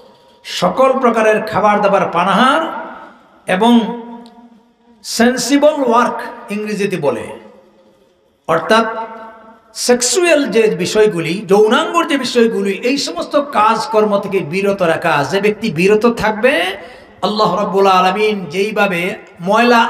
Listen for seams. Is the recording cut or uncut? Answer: uncut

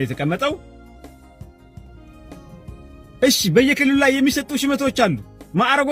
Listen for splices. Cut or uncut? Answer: uncut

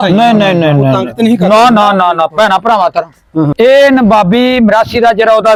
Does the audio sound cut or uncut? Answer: uncut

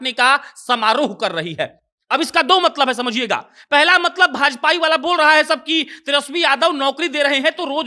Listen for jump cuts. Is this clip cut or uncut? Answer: uncut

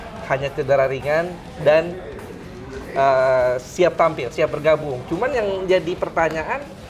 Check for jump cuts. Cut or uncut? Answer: uncut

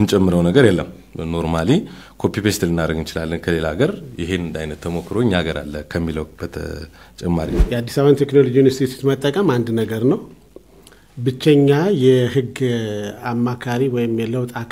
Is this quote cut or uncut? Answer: cut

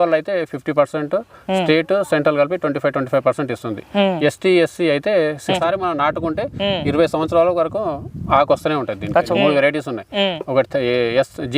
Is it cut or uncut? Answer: cut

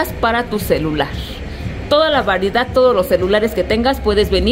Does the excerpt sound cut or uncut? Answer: uncut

